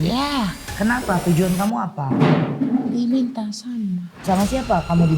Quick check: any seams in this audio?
yes; 1 cut; at 4.3 s

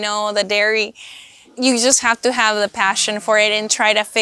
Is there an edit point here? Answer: yes; 1 cut; at 1.5 s

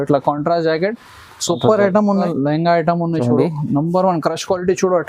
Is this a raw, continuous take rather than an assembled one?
no; 1 cut; at 2.2 s

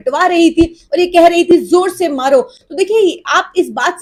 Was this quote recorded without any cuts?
yes; 0 cuts

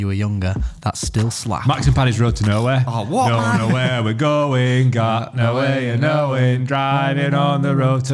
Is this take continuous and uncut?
no; 1 cut; at 1.6 s

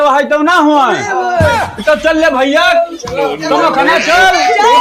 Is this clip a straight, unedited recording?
yes; 0 cuts

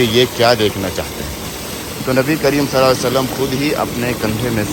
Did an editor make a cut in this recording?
no; 0 cuts

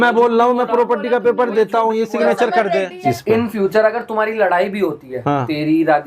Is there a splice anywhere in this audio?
yes; 1 cut; at 3.2 s

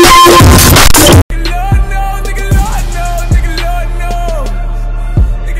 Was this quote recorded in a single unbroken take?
yes; 0 cuts

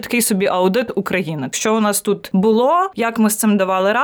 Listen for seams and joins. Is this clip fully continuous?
no; 3 cuts; at 1.5 s, 2.2 s, 2.9 s

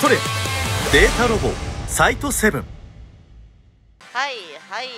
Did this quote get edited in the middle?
yes; 1 cut; at 4.0 s

